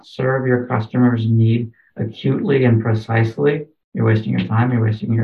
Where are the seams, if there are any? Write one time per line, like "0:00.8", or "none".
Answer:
0:03.8